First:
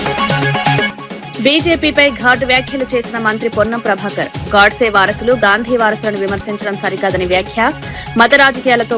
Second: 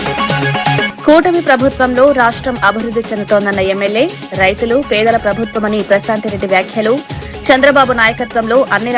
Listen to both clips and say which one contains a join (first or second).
first